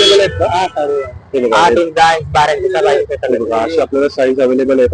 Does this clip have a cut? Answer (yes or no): no